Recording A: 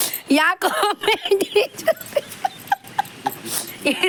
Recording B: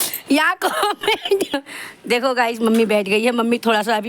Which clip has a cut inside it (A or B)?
B